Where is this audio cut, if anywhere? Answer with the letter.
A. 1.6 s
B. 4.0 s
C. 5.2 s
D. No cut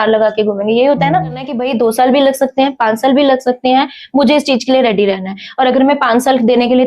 A